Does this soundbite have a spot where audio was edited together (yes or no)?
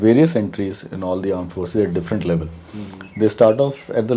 no